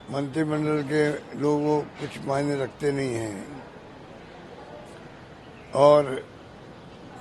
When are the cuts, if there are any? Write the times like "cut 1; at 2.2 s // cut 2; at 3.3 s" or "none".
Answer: none